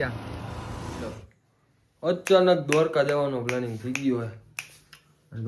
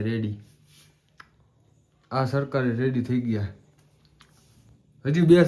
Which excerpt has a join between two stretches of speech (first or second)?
first